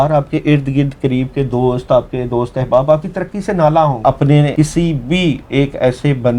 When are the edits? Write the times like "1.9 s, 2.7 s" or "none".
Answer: 4.4 s